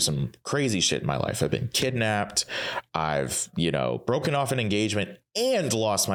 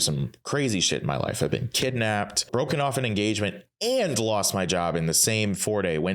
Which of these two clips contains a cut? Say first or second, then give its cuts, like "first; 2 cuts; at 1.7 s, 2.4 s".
second; 1 cut; at 2.5 s